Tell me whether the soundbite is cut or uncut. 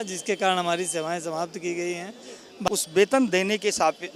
cut